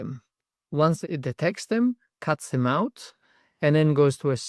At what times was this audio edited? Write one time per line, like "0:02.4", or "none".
0:01.0